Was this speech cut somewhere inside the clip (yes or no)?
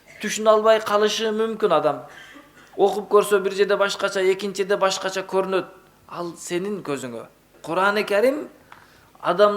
yes